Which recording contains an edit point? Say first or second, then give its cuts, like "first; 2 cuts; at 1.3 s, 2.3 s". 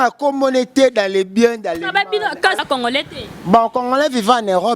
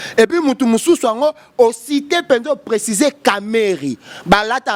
first; 1 cut; at 2.6 s